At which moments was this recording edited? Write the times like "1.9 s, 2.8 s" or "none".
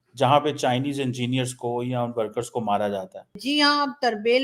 3.4 s